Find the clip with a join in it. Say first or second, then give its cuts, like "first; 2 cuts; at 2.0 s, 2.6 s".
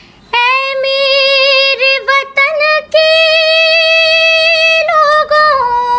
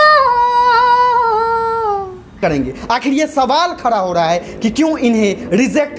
second; 1 cut; at 2.3 s